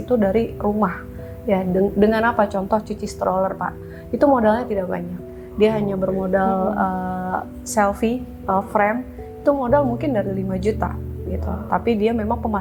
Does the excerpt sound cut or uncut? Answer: uncut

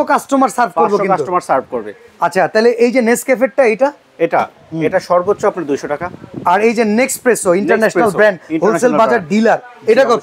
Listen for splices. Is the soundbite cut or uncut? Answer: uncut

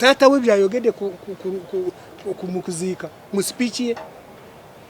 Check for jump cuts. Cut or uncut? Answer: uncut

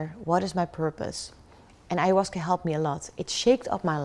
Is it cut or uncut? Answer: uncut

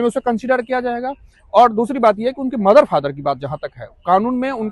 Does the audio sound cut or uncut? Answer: uncut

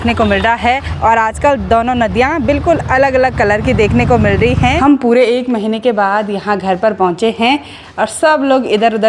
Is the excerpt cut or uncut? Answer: cut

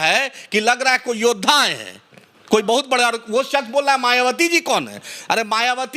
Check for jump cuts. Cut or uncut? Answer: uncut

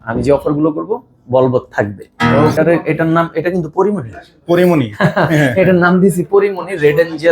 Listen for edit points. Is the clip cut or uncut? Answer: cut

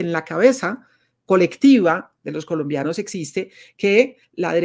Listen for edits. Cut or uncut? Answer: uncut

